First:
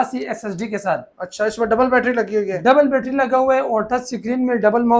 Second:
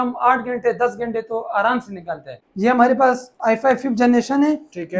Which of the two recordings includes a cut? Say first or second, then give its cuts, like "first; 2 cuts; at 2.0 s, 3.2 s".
second; 1 cut; at 2.4 s